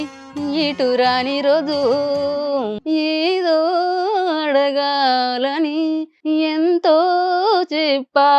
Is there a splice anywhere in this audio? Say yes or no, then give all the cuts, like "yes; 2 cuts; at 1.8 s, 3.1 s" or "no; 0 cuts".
yes; 2 cuts; at 2.8 s, 6.1 s